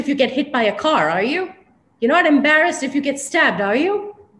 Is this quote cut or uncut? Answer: uncut